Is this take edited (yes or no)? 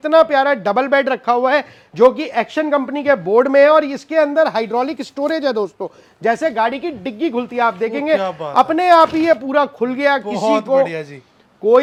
no